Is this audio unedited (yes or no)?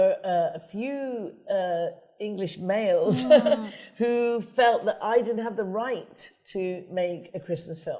yes